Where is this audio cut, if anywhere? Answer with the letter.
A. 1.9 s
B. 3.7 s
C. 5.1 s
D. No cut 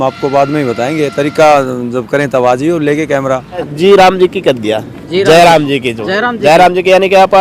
B